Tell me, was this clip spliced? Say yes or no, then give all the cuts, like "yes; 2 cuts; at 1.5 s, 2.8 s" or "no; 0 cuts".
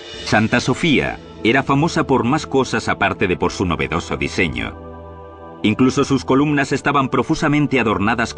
no; 0 cuts